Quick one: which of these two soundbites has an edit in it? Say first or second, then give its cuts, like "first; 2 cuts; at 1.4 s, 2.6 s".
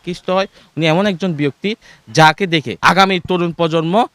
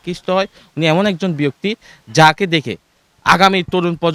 first; 1 cut; at 2.7 s